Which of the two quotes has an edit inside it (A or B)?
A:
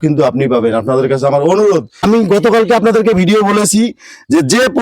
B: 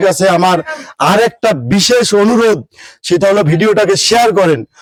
A